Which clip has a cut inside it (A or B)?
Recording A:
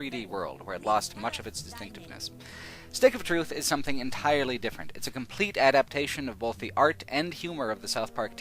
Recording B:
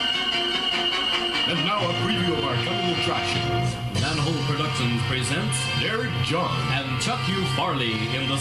A